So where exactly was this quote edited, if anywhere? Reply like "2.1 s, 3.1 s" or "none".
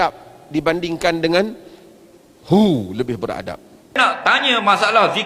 4.0 s